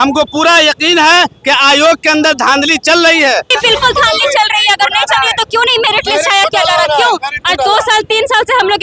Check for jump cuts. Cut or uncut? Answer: cut